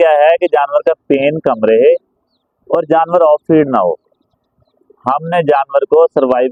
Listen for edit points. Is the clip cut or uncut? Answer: uncut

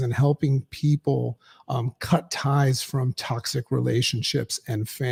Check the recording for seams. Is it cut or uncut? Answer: uncut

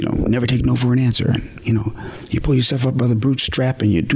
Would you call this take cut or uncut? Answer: cut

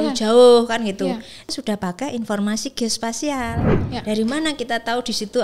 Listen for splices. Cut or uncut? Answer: cut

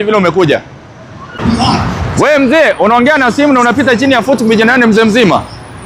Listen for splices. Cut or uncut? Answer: cut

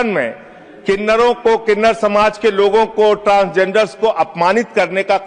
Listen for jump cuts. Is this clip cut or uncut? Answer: uncut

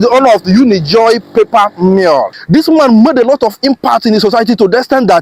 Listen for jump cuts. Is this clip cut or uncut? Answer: cut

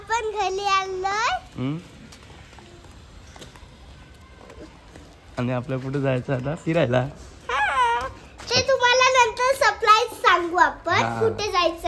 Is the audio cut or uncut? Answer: uncut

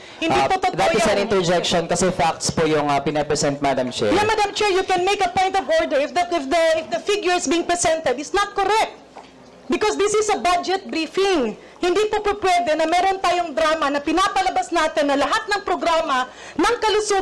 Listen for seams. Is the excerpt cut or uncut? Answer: uncut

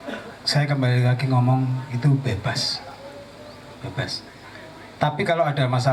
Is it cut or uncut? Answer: uncut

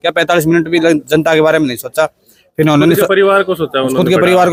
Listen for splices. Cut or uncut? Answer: uncut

